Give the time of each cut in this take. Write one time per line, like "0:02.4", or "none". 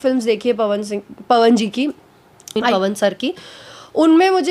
0:02.7